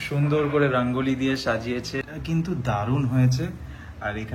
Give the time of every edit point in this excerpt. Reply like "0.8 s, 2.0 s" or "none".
2.0 s